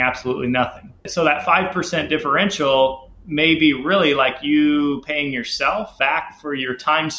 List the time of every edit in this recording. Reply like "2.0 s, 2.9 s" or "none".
5.9 s